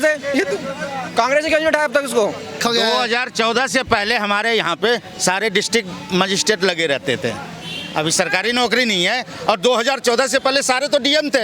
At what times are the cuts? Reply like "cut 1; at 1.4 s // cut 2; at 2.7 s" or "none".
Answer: cut 1; at 2.6 s